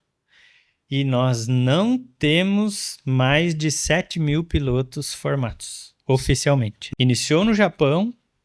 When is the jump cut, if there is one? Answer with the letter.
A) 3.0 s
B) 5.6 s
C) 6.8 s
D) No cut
C